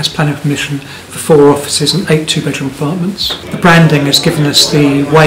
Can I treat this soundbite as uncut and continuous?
no; 1 cut; at 3.3 s

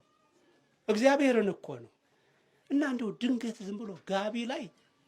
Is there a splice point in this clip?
no; 0 cuts

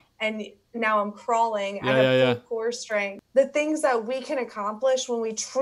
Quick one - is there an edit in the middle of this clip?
yes; 1 cut; at 3.2 s

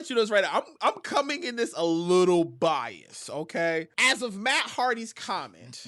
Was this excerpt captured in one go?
no; 1 cut; at 3.9 s

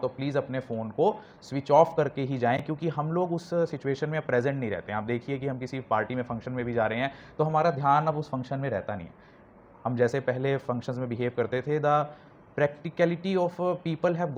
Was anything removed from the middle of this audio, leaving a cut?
no; 0 cuts

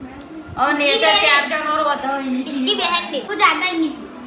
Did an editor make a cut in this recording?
yes; 1 cut; at 3.3 s

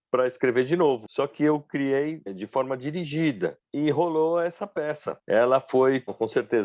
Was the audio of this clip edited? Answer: yes; 4 cuts; at 1.1 s, 2.4 s, 3.6 s, 5.1 s

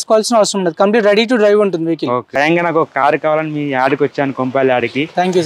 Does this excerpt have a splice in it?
yes; 1 cut; at 2.3 s

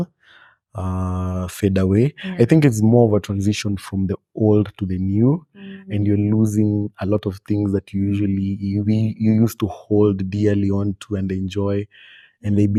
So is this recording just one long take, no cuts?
yes; 0 cuts

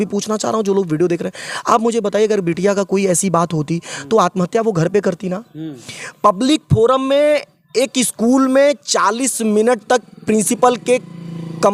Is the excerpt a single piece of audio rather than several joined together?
yes; 0 cuts

